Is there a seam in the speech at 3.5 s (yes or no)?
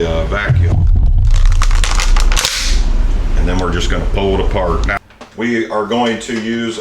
no